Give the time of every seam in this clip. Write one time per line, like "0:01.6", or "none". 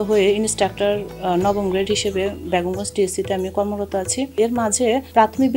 0:04.3